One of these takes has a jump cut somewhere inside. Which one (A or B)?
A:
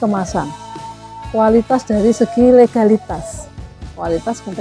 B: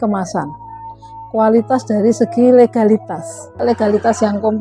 B